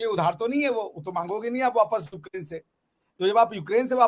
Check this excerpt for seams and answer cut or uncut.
uncut